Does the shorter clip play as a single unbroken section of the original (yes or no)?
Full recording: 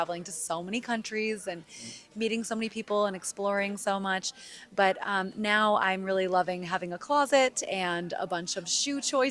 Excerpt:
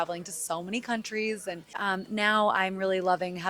no